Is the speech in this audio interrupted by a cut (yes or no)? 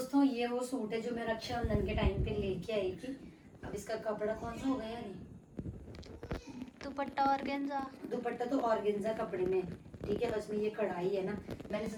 no